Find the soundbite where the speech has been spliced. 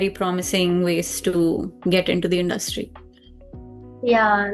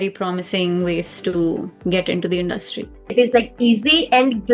second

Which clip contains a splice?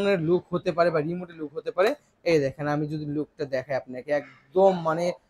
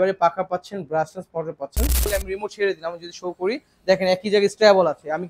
second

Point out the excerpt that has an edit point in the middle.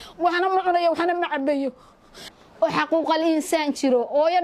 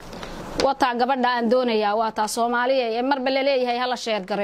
first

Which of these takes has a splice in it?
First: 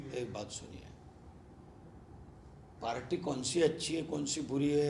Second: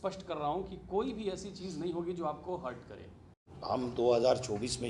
second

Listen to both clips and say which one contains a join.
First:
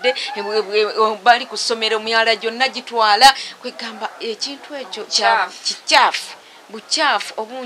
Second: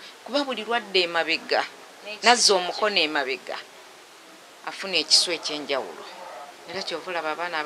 second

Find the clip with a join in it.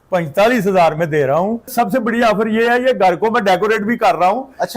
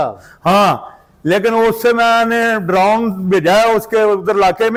first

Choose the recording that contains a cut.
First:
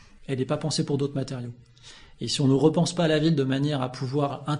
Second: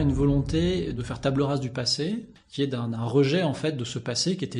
second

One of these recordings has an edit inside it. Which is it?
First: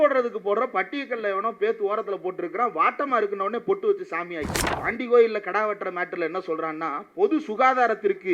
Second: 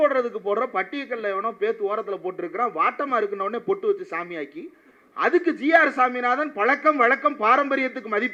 first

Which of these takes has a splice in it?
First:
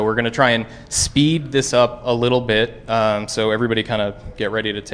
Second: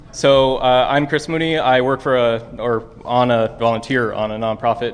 second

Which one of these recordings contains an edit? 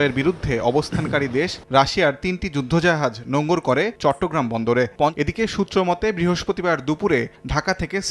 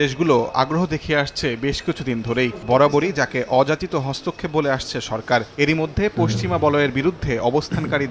first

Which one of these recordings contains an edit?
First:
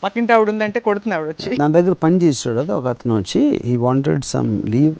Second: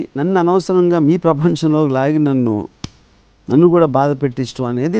first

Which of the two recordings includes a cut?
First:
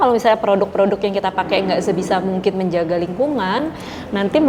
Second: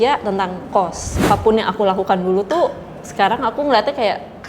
second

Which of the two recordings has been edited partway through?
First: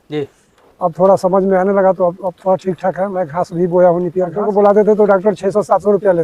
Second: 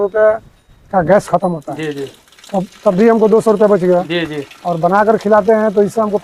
first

